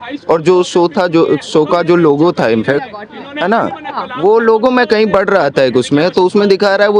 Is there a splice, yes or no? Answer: no